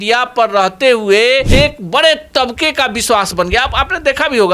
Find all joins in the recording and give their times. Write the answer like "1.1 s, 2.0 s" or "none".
1.5 s